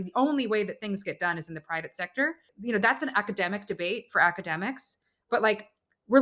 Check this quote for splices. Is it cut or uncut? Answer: cut